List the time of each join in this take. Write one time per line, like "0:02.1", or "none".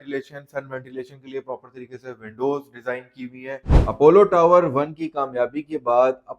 0:03.7